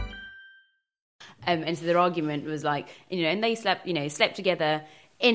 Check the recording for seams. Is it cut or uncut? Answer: cut